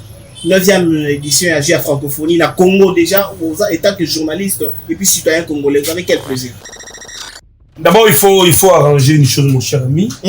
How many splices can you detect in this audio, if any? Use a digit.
1